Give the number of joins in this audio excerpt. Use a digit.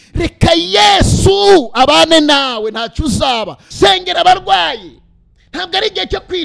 1